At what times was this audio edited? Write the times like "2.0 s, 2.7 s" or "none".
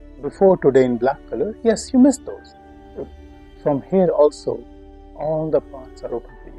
none